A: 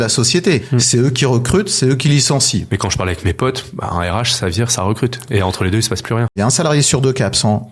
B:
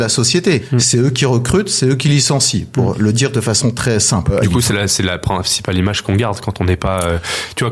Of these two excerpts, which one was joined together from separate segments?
A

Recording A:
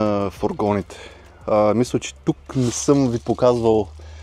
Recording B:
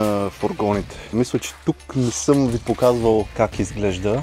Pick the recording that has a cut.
B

